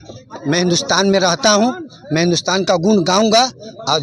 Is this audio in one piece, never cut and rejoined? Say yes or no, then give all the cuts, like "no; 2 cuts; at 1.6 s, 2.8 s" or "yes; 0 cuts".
yes; 0 cuts